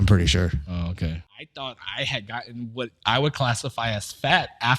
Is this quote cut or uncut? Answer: cut